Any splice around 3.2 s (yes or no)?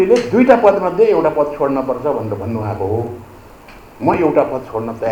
no